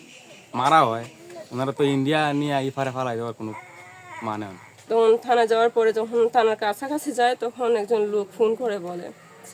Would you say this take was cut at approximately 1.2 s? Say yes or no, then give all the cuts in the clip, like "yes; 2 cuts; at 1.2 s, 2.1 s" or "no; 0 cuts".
no; 1 cut; at 4.7 s